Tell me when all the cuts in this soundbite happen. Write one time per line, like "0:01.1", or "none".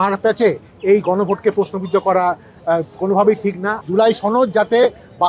0:03.8